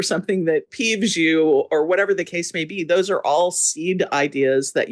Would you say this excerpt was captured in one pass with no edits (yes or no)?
yes